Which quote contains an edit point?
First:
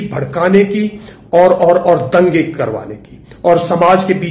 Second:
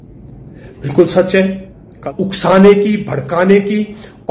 second; 1 cut; at 2.0 s

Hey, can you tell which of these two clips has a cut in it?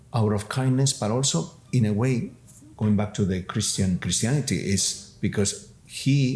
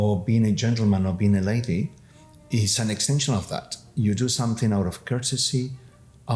first; 1 cut; at 4.0 s

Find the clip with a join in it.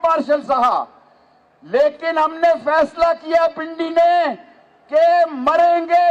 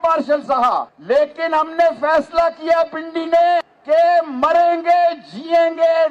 second; 2 cuts; at 0.9 s, 3.7 s

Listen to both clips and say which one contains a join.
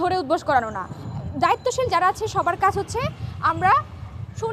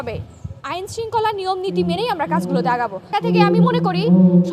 second; 1 cut; at 3.1 s

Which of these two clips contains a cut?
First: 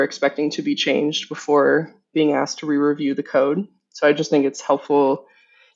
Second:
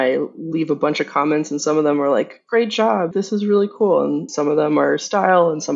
second; 2 cuts; at 3.1 s, 4.3 s

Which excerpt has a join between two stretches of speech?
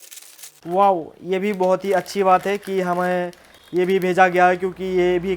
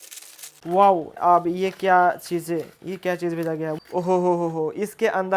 second; 2 cuts; at 1.1 s, 3.7 s

